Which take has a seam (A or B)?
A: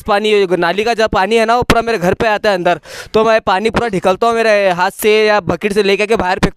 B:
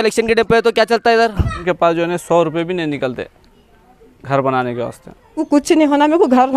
B